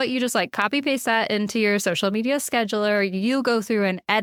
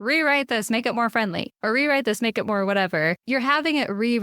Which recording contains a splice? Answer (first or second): second